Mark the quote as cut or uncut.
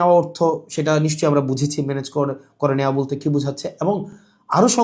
uncut